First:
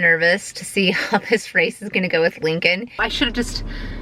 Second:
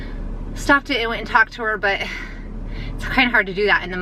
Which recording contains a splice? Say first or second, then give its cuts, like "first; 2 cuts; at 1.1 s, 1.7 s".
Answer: first; 1 cut; at 3.0 s